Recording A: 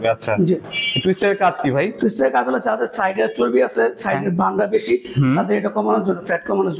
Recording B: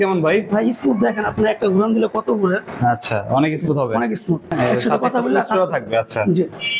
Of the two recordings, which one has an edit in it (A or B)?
B